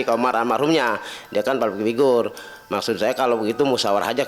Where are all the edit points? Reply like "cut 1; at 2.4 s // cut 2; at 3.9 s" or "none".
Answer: none